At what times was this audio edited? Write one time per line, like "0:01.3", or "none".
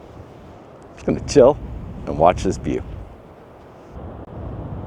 0:04.0